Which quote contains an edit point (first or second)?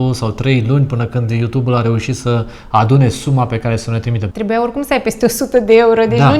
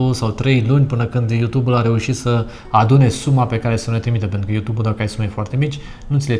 first